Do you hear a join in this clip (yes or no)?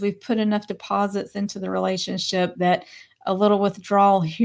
no